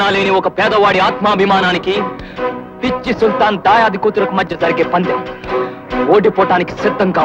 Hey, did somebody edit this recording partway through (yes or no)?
no